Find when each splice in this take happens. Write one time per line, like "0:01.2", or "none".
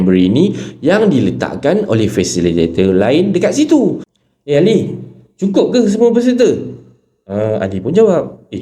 0:04.1